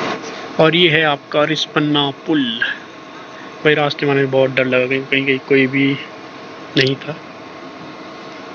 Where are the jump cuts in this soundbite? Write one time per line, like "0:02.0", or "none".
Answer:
none